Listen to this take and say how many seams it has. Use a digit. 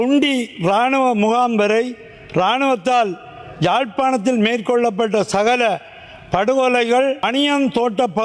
1